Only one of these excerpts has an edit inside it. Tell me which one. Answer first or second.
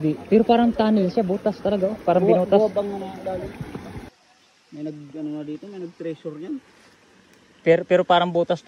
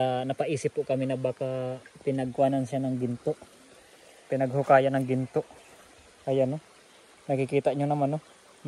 first